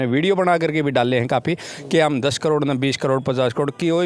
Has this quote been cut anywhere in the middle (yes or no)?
no